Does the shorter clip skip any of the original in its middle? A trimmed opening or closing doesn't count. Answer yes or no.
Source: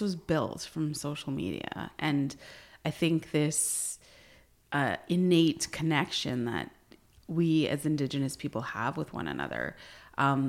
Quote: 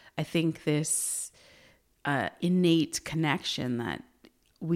no